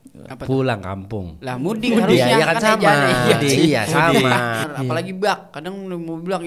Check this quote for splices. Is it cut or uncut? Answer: cut